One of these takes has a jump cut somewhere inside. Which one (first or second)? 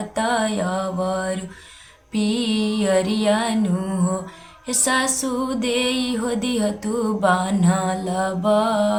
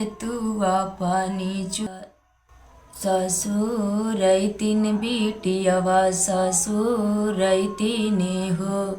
second